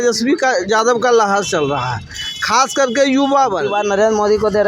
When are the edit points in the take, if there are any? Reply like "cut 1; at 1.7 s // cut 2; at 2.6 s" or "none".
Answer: cut 1; at 3.7 s